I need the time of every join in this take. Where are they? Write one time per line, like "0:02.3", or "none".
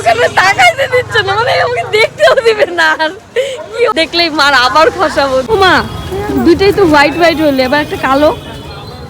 0:03.9
0:05.5